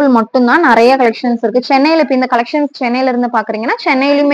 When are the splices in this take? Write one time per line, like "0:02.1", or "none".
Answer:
none